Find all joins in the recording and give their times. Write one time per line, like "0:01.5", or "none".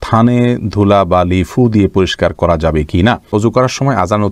0:03.3